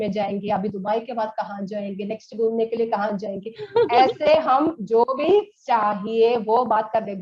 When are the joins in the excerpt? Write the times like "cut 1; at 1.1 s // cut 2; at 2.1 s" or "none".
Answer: none